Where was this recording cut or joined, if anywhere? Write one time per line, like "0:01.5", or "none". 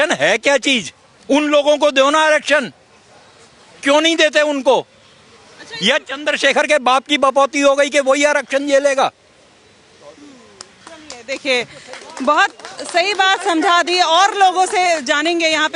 none